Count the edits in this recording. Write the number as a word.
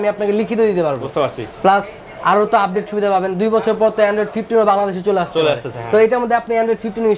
zero